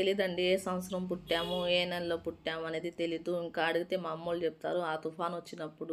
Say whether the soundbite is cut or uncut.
uncut